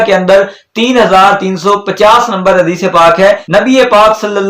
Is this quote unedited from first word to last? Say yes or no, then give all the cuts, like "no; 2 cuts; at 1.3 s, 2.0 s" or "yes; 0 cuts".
no; 1 cut; at 3.4 s